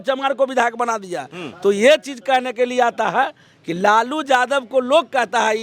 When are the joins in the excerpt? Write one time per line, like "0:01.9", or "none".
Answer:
none